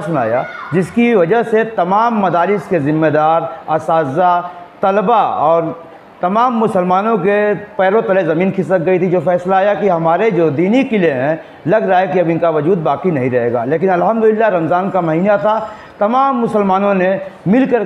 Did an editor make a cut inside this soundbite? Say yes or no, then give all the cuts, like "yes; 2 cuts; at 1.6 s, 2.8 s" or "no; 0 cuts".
no; 0 cuts